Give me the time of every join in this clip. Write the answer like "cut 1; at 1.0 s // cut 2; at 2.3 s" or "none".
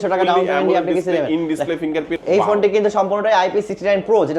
cut 1; at 2.2 s